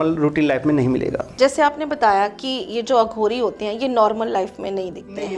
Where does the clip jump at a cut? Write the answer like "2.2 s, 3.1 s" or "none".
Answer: none